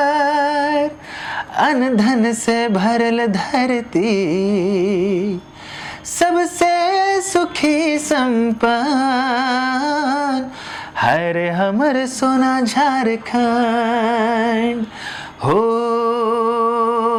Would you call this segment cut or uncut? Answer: uncut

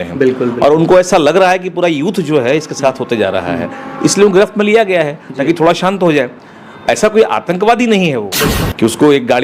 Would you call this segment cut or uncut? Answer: cut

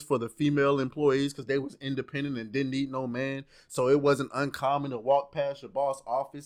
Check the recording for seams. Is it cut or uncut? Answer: uncut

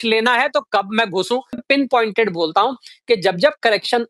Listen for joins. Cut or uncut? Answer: cut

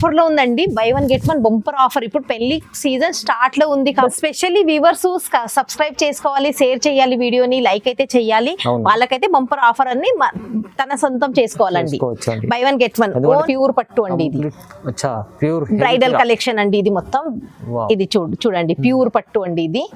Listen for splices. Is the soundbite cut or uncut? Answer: cut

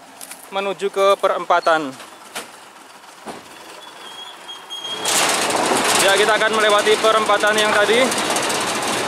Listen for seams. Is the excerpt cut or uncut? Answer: cut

